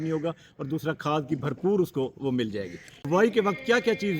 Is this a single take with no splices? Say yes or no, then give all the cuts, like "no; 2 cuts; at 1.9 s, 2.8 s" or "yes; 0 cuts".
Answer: no; 1 cut; at 2.9 s